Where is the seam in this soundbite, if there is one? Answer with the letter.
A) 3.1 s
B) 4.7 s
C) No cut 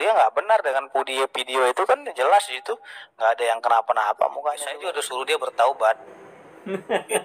B